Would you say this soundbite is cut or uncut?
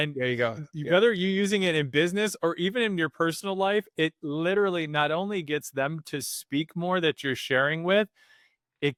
uncut